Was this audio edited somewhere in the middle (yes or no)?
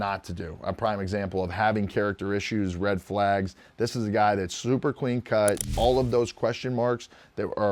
yes